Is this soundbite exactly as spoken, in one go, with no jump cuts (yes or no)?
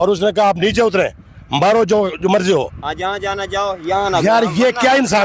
yes